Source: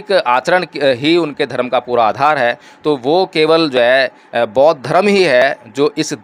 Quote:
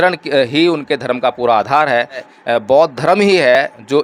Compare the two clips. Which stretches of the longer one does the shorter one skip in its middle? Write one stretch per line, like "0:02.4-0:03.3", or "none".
0:02.7-0:04.1